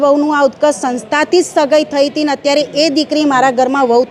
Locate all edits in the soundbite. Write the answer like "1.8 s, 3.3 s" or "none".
none